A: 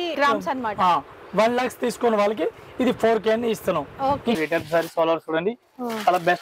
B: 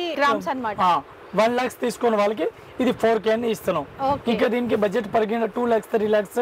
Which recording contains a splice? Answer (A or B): A